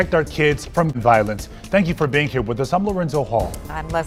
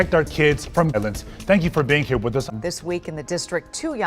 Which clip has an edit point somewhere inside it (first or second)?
second